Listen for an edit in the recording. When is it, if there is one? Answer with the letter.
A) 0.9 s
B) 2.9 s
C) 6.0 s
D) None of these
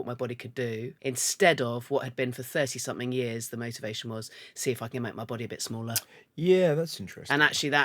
A